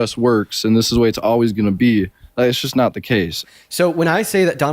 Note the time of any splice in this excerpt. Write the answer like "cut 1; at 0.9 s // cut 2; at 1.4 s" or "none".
cut 1; at 3.4 s